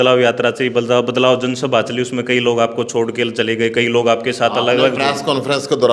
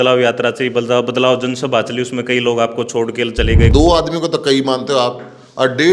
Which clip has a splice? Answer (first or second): second